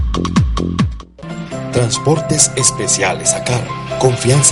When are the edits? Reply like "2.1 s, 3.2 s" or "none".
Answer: 0.9 s